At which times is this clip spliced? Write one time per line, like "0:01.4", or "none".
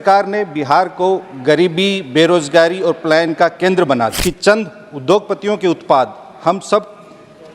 0:04.2

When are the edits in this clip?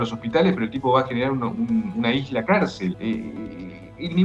0:03.0

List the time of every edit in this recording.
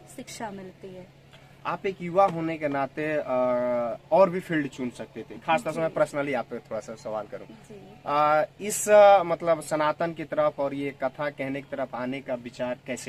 none

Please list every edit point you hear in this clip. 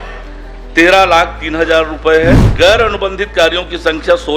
0:02.5

